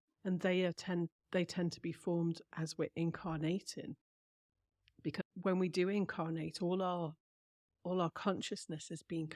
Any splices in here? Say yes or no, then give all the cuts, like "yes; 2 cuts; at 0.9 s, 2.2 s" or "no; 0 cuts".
yes; 1 cut; at 5.2 s